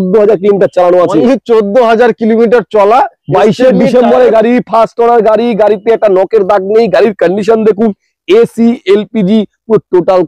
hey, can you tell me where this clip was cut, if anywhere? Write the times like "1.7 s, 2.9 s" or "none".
none